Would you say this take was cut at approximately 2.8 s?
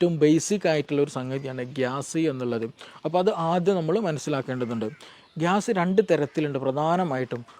no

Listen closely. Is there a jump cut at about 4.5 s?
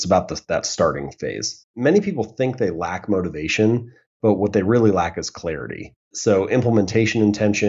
no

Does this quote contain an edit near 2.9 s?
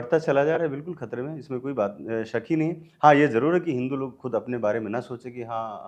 no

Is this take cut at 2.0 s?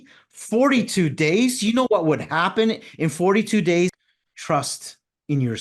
no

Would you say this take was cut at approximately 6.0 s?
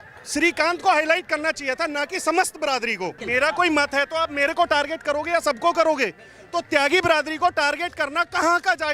no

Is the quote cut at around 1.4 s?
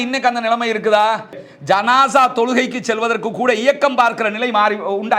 yes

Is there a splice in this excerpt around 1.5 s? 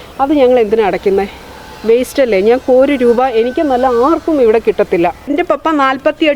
no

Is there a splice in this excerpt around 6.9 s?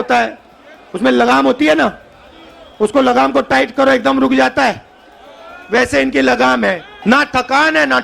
yes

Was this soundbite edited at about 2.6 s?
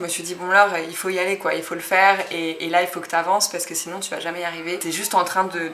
no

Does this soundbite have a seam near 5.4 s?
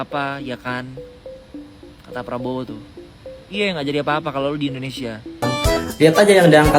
yes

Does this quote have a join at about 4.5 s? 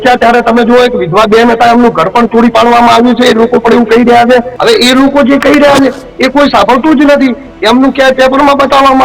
yes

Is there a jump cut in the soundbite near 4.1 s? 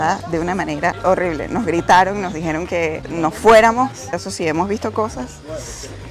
yes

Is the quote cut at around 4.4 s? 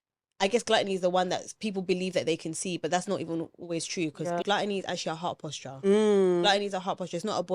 yes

